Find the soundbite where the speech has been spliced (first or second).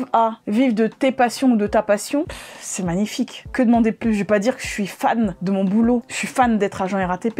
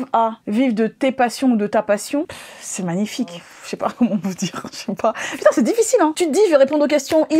second